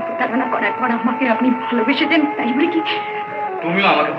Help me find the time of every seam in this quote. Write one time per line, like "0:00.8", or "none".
none